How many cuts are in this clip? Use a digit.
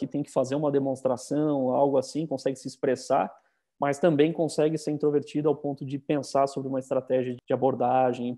1